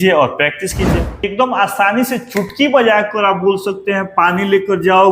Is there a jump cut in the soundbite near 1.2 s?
yes; 1 cut; at 1.2 s

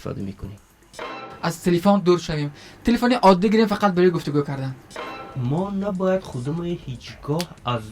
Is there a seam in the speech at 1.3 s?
yes; 2 cuts; at 1.3 s, 5.2 s

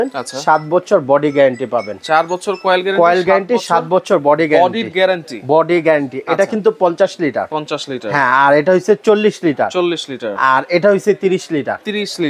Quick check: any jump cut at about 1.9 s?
no; 0 cuts

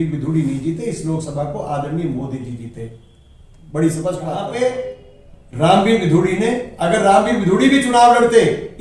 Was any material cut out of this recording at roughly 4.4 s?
yes; 1 cut; at 4.4 s

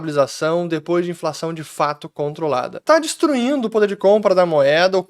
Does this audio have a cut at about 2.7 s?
yes; 1 cut; at 2.7 s

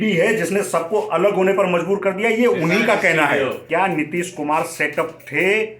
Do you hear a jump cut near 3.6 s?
yes; 1 cut; at 3.6 s

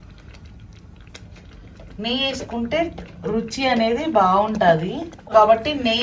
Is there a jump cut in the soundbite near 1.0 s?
no; 0 cuts

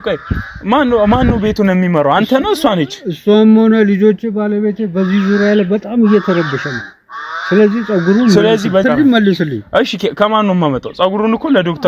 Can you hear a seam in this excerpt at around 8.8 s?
yes; 1 cut; at 8.8 s

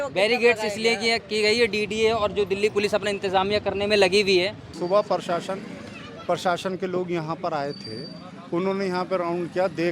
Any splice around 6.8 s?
no; 1 cut; at 4.6 s

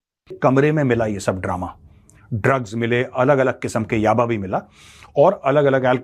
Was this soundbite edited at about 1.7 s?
no; 0 cuts

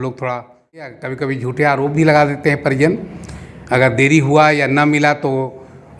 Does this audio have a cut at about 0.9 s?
yes; 1 cut; at 0.9 s

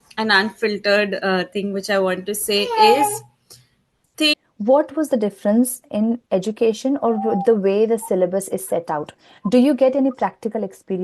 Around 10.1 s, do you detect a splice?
no; 1 cut; at 4.3 s

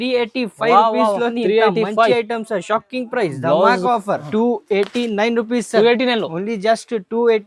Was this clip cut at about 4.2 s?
yes; 1 cut; at 4.2 s

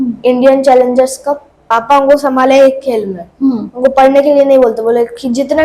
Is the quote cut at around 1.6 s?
yes; 1 cut; at 1.6 s

